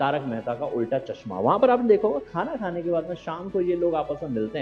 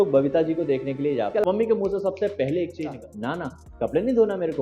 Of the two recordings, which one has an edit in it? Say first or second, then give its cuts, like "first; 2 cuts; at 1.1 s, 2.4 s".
second; 2 cuts; at 1.4 s, 2.9 s